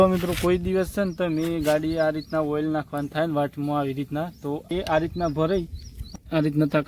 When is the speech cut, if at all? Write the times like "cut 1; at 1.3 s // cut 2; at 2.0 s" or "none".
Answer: cut 1; at 4.7 s // cut 2; at 6.1 s